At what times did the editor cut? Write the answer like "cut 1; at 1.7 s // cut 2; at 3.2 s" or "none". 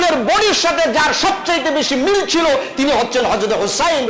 none